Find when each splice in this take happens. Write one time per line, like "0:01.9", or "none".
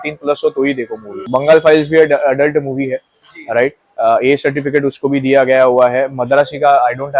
0:01.2

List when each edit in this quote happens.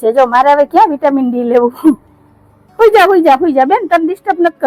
none

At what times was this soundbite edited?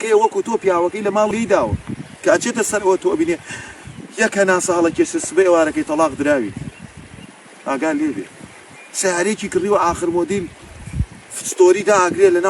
0:01.3

